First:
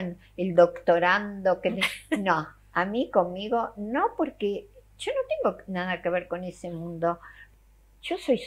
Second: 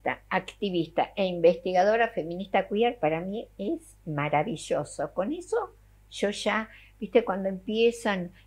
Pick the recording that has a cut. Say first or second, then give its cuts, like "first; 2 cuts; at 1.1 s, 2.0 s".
first; 2 cuts; at 4.8 s, 7.4 s